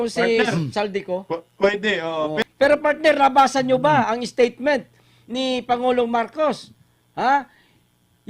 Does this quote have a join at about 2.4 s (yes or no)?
yes